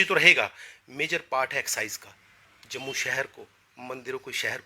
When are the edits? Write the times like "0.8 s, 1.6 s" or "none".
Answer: none